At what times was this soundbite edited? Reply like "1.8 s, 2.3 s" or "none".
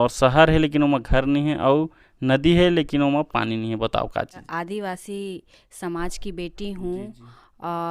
4.5 s